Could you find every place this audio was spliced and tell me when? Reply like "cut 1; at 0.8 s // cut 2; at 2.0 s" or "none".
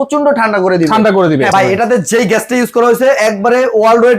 cut 1; at 1.5 s